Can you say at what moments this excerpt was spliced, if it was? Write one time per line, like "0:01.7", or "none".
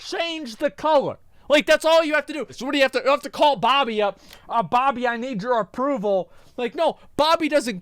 0:02.5
0:06.4